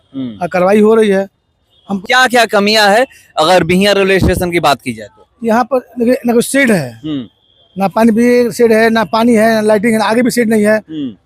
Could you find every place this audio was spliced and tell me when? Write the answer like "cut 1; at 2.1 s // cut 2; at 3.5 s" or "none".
cut 1; at 2.0 s